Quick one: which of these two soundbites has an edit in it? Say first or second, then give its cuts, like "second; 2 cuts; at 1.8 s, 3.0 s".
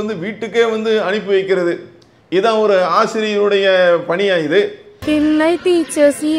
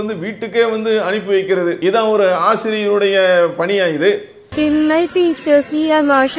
second; 1 cut; at 1.8 s